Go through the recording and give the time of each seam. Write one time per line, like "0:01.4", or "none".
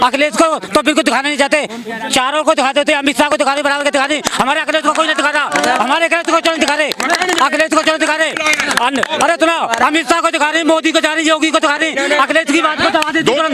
none